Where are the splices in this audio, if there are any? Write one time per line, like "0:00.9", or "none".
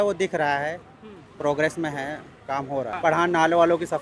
0:02.9